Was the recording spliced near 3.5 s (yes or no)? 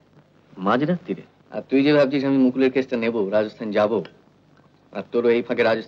no